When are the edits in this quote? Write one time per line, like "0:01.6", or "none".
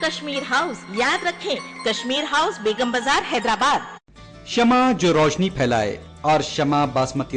0:04.2